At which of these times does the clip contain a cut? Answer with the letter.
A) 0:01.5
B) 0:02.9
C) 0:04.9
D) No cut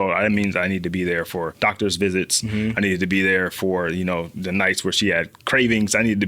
A